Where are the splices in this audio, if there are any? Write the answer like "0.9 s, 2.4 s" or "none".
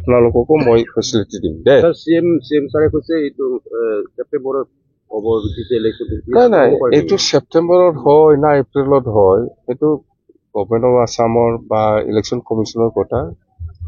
none